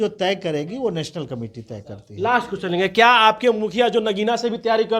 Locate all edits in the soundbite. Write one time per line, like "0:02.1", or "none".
none